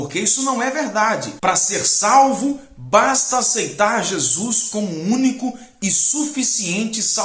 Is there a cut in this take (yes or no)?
yes